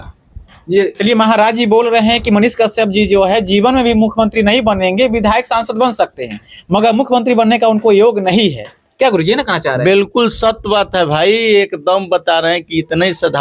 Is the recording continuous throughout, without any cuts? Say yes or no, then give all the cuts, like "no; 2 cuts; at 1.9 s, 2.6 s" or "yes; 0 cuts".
yes; 0 cuts